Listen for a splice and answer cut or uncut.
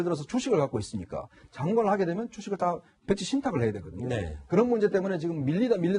cut